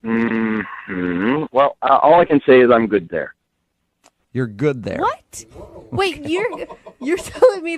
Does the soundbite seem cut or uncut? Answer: uncut